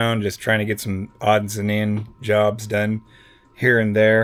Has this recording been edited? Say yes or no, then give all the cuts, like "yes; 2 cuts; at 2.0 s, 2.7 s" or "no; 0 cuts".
no; 0 cuts